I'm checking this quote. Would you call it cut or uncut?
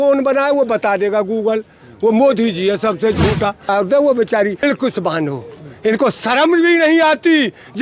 cut